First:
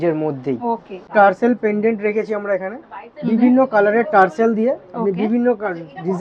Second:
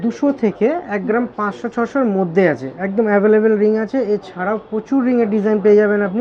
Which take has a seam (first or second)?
first